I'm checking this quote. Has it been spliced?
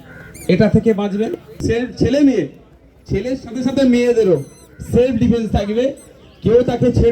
yes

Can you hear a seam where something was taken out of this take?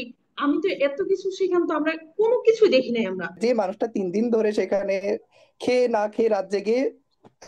yes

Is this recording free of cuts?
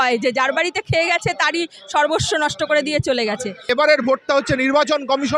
no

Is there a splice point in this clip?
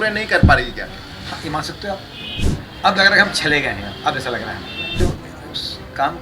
yes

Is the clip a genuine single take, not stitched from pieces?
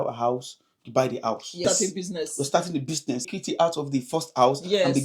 no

